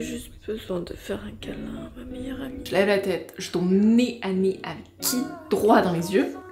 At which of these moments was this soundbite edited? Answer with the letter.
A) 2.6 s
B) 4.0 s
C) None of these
A